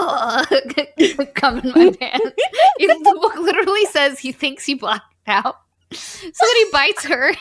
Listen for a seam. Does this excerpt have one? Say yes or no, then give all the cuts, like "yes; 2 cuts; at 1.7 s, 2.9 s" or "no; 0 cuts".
no; 0 cuts